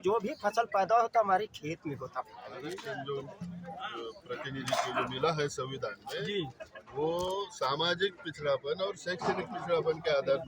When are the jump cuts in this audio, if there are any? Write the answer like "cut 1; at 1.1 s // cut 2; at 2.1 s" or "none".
cut 1; at 2.7 s